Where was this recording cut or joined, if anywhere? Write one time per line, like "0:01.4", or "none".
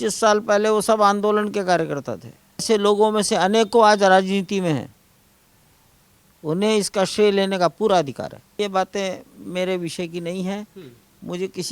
0:02.6
0:08.6